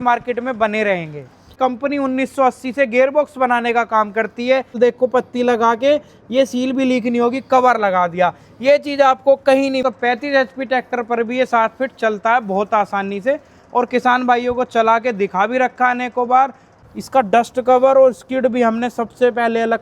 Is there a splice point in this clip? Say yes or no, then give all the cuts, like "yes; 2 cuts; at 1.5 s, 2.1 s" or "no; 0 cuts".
yes; 4 cuts; at 1.6 s, 4.8 s, 9.8 s, 16.7 s